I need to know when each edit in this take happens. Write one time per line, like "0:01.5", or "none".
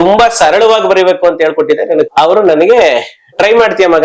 0:02.1